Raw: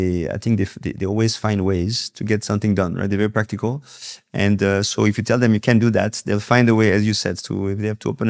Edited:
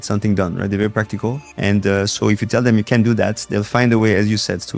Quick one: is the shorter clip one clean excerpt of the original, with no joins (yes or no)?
no